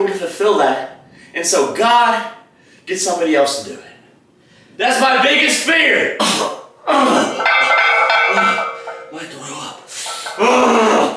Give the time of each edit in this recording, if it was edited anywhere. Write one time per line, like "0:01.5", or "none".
0:06.2